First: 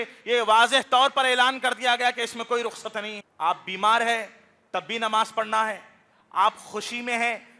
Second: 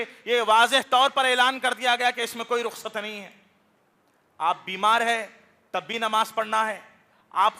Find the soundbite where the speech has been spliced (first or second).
first